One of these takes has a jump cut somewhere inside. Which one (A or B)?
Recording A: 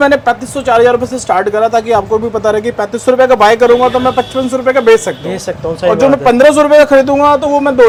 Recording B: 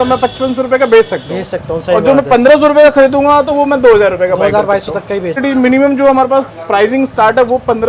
B